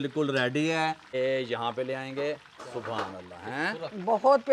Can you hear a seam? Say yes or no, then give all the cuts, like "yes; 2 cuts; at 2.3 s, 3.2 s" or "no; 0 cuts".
yes; 1 cut; at 1.1 s